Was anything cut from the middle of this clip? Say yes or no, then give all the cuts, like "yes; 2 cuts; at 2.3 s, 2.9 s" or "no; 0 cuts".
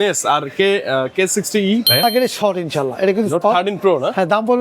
yes; 1 cut; at 2.0 s